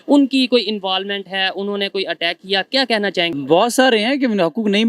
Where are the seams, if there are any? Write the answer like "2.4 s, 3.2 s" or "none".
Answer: 3.3 s